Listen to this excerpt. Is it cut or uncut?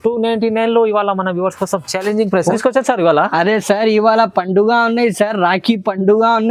cut